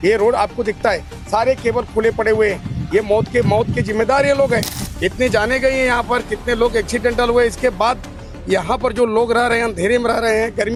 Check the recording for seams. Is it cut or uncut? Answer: uncut